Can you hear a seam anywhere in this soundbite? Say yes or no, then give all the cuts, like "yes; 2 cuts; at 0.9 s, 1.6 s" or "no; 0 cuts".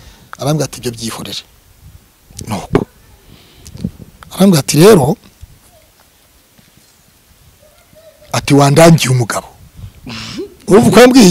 no; 0 cuts